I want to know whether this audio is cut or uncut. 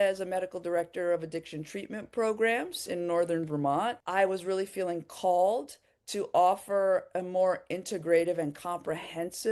cut